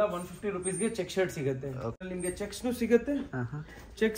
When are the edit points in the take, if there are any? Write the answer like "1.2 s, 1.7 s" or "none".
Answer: 2.0 s